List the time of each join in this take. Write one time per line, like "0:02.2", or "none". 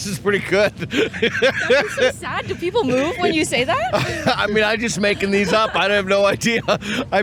none